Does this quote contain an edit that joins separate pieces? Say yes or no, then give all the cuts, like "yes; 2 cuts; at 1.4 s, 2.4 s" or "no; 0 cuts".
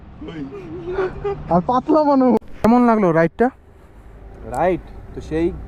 yes; 1 cut; at 2.5 s